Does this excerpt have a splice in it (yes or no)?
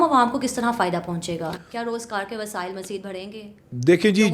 no